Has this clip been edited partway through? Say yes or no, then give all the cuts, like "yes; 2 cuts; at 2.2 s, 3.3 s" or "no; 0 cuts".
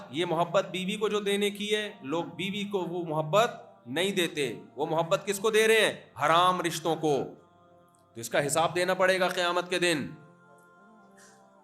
no; 0 cuts